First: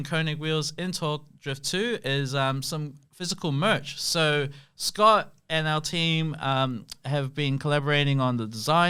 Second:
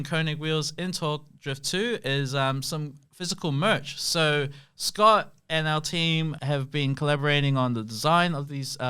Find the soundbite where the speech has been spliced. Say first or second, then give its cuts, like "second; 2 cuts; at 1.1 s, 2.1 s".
second; 1 cut; at 6.4 s